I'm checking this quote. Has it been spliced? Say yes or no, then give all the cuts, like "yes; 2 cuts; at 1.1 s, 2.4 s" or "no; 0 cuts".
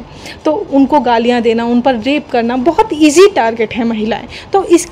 no; 0 cuts